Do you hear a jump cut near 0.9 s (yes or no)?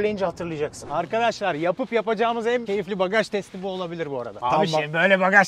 yes